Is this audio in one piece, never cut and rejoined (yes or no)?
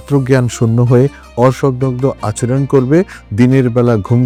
yes